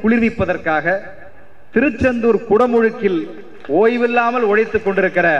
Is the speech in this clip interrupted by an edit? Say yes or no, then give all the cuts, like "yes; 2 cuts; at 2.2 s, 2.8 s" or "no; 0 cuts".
no; 0 cuts